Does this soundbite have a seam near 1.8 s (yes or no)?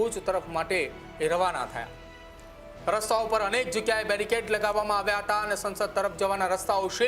no